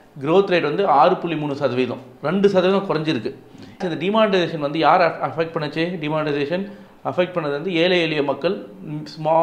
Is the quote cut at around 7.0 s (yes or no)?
no